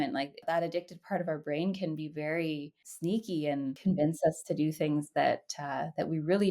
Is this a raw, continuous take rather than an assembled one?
no; 1 cut; at 3.8 s

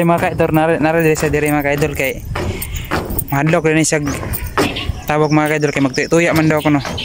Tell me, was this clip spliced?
no; 0 cuts

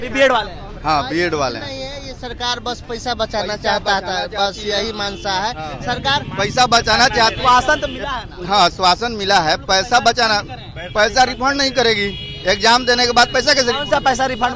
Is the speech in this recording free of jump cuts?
yes; 0 cuts

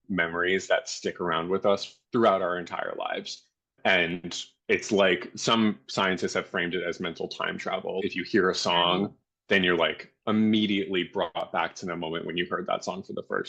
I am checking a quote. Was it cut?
no; 0 cuts

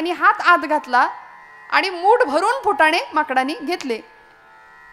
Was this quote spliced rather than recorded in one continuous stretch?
no; 0 cuts

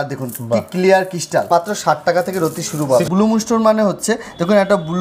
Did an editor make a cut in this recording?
yes; 2 cuts; at 1.5 s, 3.1 s

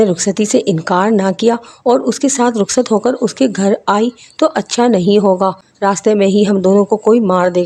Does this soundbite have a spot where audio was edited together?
no; 0 cuts

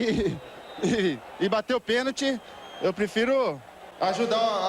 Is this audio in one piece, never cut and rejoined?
yes; 0 cuts

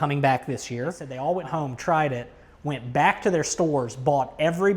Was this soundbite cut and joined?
yes; 1 cut; at 1.0 s

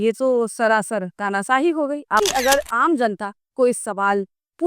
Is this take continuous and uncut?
no; 1 cut; at 2.2 s

